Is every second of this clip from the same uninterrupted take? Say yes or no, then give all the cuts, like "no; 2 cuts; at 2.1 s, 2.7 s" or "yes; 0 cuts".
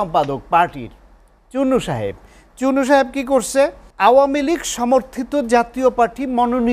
no; 1 cut; at 3.8 s